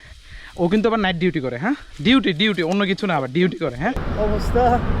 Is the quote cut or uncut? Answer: cut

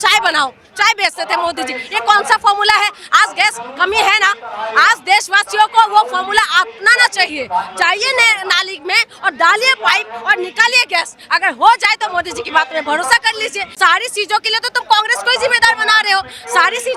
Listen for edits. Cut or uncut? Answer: cut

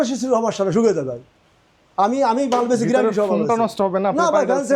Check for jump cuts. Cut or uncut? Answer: uncut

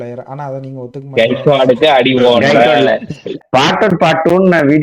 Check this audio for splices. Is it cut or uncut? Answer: cut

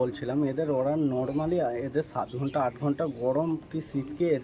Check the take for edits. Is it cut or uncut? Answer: uncut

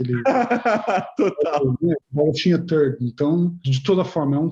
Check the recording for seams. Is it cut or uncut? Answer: uncut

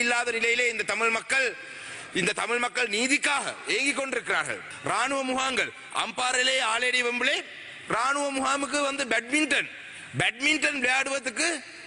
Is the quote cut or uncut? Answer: cut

